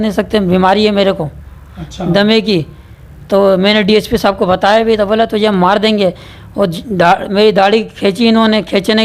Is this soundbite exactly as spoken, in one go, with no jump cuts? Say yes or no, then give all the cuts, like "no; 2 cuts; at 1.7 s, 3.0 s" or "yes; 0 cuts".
yes; 0 cuts